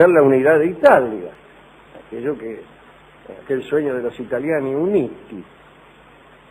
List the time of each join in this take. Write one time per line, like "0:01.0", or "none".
0:01.5